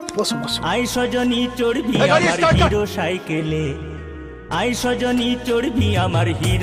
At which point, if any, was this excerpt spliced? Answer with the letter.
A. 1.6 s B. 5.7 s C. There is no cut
C